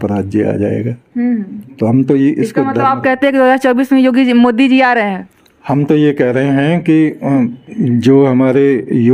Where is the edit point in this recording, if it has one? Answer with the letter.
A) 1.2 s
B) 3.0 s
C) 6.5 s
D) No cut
D